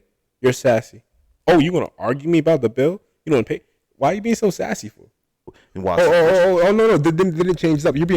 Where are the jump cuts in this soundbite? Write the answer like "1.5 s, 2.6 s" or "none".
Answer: 5.6 s